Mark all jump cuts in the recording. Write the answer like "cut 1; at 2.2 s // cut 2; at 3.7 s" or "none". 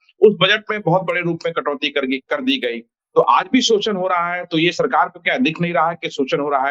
none